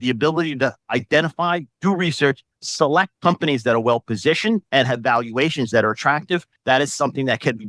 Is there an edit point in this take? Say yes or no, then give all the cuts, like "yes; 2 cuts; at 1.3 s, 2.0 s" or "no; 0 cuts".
yes; 4 cuts; at 0.8 s, 3.1 s, 4.7 s, 6.5 s